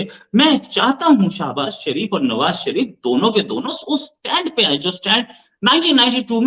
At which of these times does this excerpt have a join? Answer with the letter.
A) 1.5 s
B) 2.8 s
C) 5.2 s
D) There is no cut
D